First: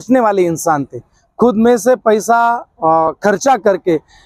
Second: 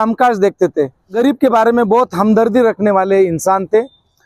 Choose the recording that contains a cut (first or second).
second